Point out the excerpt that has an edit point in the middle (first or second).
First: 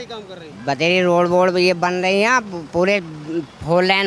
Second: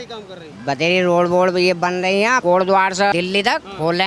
second